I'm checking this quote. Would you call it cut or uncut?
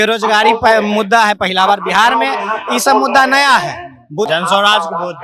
cut